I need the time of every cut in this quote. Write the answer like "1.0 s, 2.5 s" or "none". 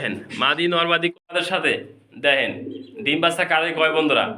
1.1 s